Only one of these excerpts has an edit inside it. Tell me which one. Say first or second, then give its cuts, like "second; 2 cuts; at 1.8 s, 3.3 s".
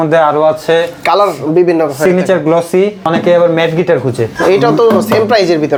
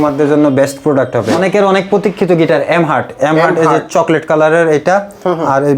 second; 1 cut; at 1.3 s